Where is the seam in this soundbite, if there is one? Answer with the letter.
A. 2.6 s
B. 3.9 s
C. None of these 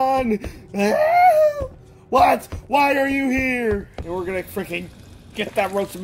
B